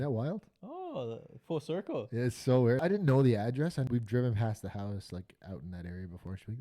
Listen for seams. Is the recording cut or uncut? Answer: cut